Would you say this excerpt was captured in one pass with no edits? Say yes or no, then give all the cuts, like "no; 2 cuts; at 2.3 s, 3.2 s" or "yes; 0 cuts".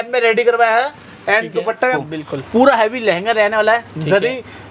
no; 1 cut; at 2.0 s